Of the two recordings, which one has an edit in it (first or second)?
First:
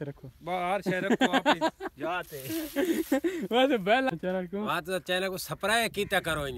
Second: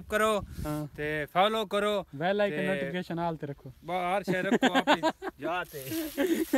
first